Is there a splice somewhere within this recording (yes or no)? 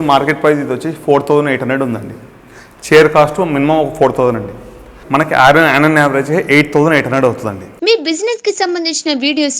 yes